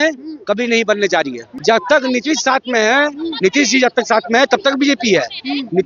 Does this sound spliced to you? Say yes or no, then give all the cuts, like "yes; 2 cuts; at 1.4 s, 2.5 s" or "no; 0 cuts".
yes; 1 cut; at 1.5 s